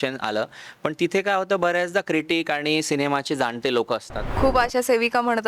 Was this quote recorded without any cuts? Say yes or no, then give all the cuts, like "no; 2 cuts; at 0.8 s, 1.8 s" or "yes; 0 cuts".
no; 1 cut; at 4.2 s